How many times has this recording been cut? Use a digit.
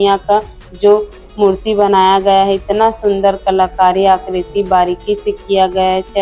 0